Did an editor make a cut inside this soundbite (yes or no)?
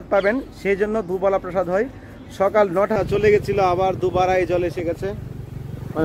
yes